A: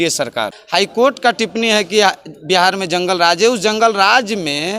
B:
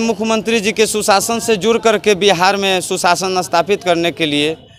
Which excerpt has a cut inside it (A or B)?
A